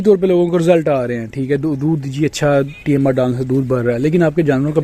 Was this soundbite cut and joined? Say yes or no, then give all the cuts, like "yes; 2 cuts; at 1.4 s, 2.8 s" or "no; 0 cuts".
no; 0 cuts